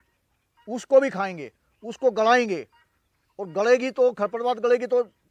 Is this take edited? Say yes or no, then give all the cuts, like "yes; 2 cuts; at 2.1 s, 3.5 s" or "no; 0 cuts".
no; 0 cuts